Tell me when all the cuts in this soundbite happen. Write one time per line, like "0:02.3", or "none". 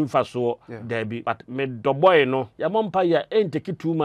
0:01.2
0:02.5